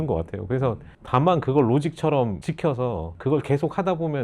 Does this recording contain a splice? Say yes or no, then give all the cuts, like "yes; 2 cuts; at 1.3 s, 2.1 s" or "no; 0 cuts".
yes; 2 cuts; at 0.9 s, 2.8 s